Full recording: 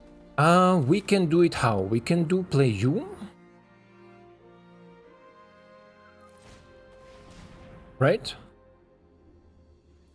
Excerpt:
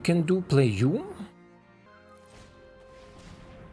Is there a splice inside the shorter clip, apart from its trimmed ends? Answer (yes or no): yes